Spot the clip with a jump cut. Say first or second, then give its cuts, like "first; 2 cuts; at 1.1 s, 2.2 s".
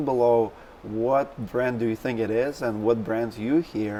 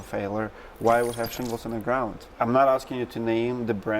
second; 1 cut; at 2.2 s